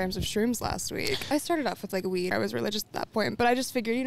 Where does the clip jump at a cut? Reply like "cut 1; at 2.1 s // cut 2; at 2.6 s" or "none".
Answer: cut 1; at 1.3 s // cut 2; at 2.3 s